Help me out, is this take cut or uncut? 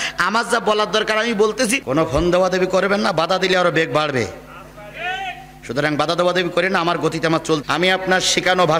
cut